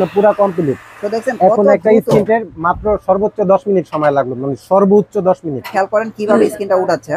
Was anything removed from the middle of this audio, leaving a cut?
yes; 1 cut; at 5.7 s

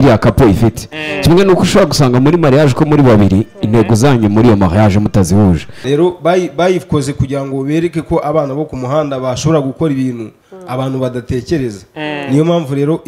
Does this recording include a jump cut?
yes; 1 cut; at 5.7 s

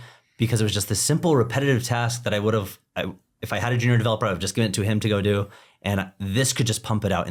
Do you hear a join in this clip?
no; 0 cuts

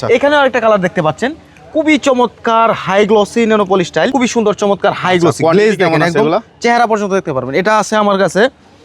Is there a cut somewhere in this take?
yes; 1 cut; at 4.1 s

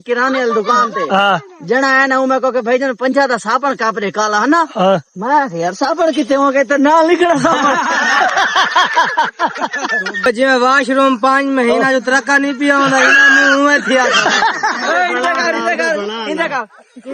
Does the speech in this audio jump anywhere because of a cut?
yes; 1 cut; at 10.3 s

